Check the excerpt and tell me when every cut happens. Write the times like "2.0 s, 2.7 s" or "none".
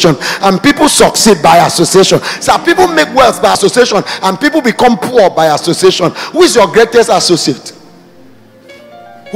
3.6 s